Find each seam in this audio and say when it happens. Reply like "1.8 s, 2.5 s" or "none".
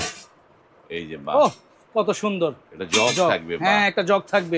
none